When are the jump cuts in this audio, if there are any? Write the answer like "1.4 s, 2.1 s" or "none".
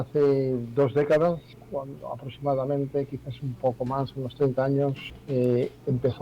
1.6 s, 5.1 s